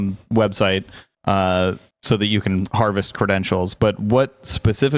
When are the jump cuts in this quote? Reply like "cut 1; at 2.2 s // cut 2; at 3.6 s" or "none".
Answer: none